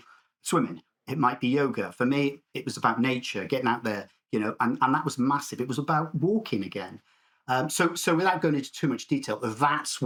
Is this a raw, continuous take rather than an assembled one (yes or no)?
yes